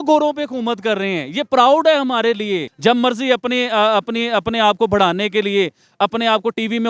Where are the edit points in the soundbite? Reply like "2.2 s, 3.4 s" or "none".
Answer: 2.7 s